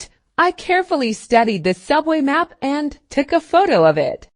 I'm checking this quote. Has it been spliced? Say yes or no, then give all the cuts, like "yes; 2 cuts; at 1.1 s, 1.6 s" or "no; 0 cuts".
yes; 1 cut; at 2.5 s